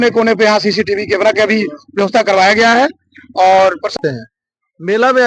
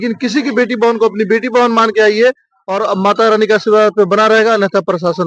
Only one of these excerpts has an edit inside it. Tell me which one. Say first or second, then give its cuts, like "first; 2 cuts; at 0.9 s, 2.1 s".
first; 1 cut; at 3.9 s